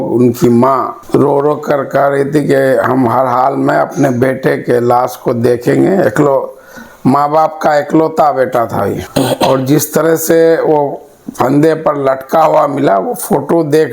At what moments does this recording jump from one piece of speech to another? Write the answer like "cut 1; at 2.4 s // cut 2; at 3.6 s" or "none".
cut 1; at 9.0 s